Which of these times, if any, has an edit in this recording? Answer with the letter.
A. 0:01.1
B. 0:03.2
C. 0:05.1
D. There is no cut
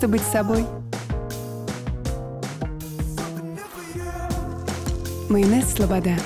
D